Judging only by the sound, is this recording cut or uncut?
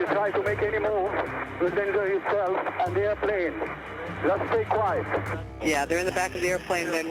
cut